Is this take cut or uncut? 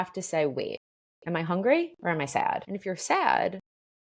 cut